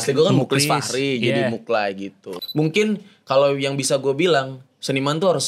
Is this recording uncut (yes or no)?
no